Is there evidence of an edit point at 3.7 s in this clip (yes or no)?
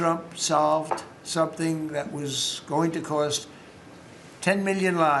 no